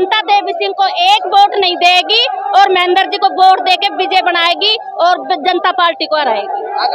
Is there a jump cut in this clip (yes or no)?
no